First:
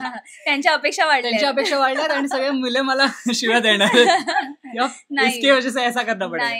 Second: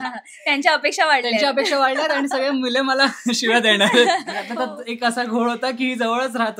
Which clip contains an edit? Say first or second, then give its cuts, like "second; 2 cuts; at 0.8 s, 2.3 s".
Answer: second; 1 cut; at 4.4 s